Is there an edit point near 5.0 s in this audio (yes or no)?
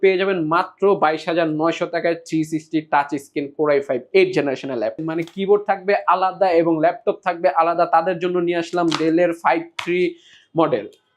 yes